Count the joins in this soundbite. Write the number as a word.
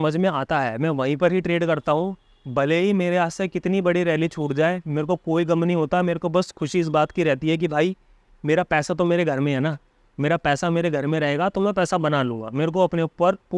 zero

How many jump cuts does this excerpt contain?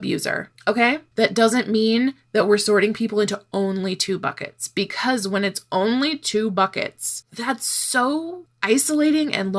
one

